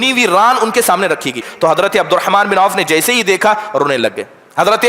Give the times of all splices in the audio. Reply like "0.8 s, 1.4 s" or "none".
1.5 s